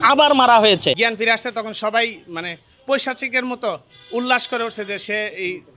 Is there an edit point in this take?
yes; 1 cut; at 1.0 s

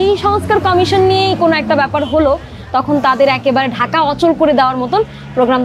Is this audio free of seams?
yes; 0 cuts

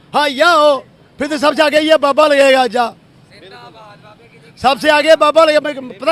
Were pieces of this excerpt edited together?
no; 0 cuts

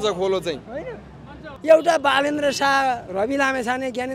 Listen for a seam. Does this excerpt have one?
yes; 1 cut; at 1.5 s

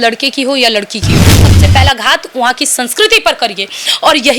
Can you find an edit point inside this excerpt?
yes; 1 cut; at 1.4 s

